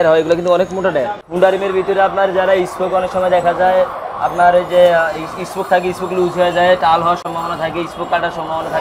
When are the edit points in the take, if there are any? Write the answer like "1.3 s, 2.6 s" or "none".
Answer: 1.2 s